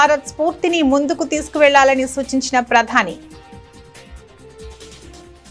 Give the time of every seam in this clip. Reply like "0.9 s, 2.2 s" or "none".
none